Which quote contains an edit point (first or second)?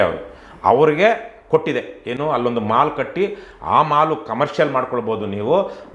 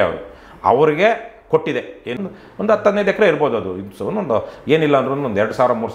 second